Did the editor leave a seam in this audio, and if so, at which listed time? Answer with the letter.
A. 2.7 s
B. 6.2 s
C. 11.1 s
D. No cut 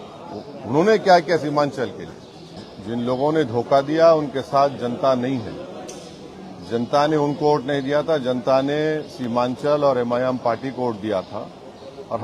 A